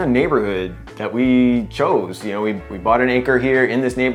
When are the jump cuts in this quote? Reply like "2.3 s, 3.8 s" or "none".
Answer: none